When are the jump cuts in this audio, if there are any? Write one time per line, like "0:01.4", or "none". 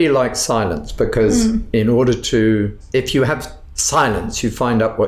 none